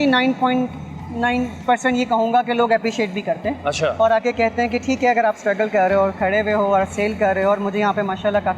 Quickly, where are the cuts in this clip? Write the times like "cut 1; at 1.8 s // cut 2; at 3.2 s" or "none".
none